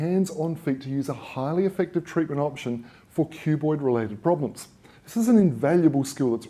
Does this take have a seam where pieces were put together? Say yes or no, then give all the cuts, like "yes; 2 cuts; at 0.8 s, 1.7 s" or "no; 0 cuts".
yes; 1 cut; at 1.7 s